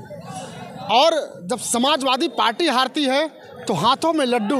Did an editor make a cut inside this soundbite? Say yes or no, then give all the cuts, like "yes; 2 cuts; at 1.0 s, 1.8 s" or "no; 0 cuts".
no; 0 cuts